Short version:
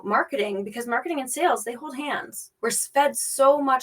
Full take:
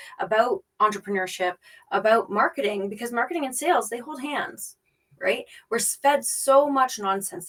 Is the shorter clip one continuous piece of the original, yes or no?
no